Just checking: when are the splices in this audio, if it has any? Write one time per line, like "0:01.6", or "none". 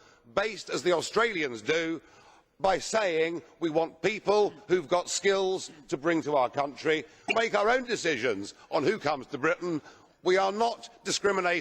0:07.3